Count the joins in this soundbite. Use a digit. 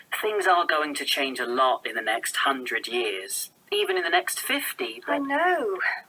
1